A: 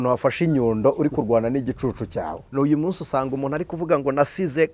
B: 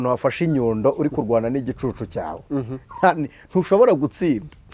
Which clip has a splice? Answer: A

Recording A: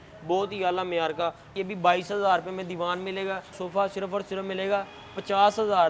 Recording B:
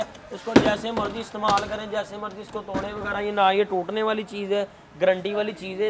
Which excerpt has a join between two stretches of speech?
A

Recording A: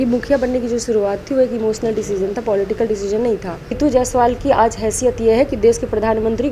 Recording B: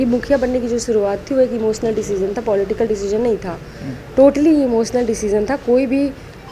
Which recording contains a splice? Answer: A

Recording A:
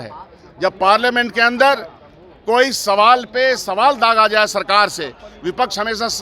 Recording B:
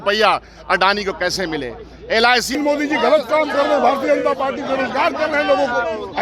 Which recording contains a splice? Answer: B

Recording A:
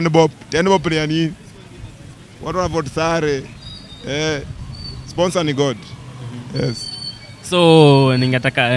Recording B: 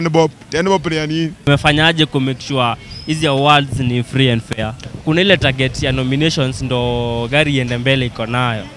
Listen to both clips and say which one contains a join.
B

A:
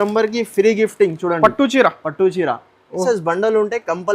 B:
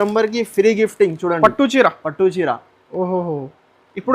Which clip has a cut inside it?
A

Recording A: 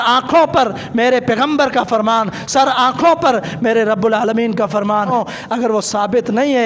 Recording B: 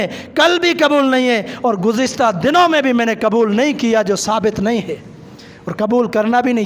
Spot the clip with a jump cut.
A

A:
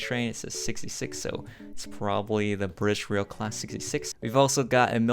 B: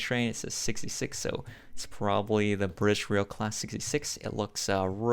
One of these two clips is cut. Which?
A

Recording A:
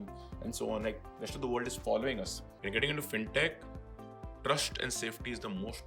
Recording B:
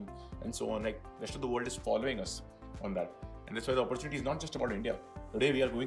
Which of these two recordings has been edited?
A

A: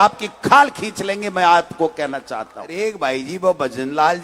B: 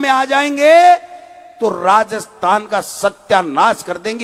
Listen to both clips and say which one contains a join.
A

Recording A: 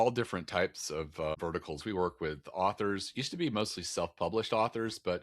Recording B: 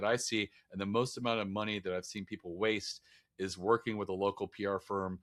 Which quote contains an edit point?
A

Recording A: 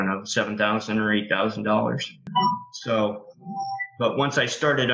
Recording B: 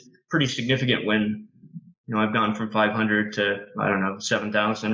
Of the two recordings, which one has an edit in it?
A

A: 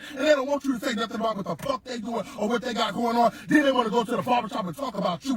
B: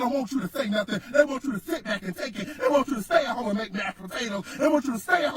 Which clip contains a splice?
B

